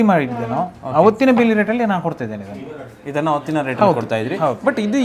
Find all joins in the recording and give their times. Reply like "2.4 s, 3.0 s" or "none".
none